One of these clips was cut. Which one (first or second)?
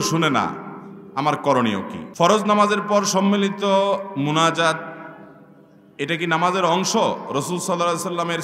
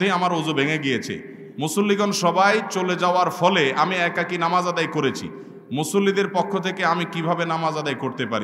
first